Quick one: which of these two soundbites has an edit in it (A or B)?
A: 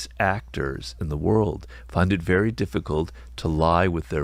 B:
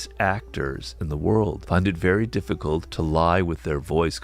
B